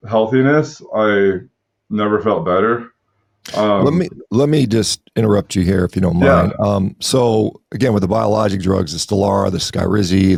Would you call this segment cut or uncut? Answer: uncut